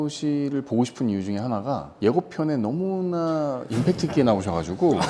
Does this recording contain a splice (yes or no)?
no